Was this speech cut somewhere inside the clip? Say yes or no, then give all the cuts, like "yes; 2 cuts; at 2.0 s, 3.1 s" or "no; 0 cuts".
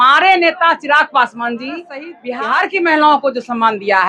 yes; 1 cut; at 2.2 s